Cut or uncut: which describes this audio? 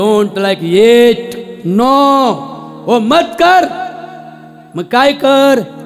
uncut